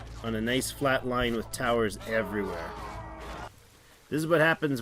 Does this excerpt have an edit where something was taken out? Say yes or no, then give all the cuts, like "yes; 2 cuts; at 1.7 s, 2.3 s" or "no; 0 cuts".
yes; 1 cut; at 3.5 s